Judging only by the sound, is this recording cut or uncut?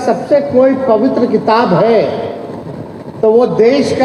uncut